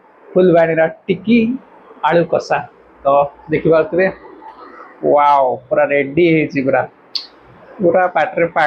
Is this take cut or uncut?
uncut